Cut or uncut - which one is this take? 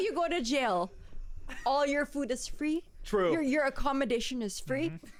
uncut